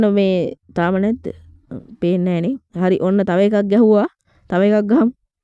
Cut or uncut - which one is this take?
uncut